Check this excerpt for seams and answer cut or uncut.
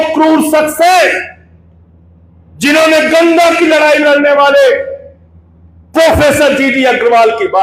uncut